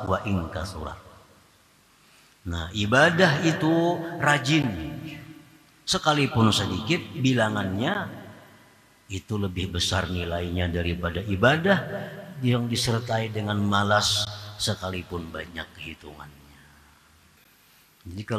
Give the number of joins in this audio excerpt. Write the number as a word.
one